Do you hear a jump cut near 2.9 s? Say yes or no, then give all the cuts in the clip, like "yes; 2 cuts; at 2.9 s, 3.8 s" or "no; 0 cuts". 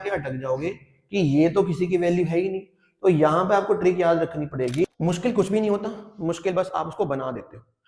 no; 1 cut; at 4.9 s